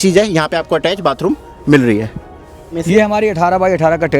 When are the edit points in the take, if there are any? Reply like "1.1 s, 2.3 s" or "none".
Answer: 2.8 s